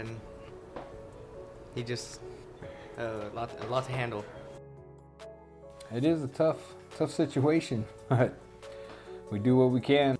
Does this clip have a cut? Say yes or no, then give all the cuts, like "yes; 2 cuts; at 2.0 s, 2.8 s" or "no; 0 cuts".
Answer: yes; 3 cuts; at 2.4 s, 4.4 s, 5.9 s